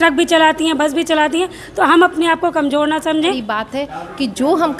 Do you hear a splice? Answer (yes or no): yes